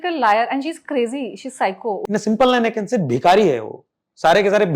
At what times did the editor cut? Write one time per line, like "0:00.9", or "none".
0:02.0